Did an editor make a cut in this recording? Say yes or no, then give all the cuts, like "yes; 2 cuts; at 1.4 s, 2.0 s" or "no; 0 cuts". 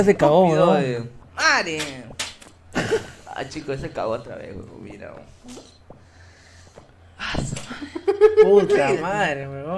yes; 1 cut; at 1.2 s